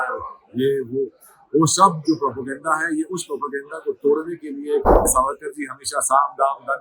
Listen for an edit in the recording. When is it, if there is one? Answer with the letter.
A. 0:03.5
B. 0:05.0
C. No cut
B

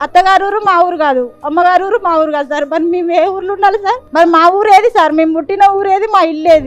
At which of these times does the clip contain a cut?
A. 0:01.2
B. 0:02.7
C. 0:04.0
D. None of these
C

